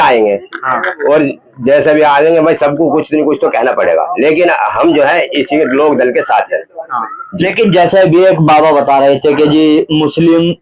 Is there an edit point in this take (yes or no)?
no